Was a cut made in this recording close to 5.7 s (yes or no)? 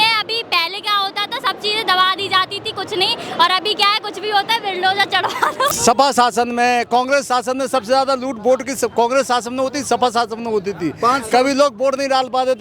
yes